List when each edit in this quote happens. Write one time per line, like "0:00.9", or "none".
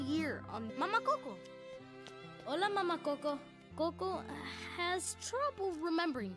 0:03.6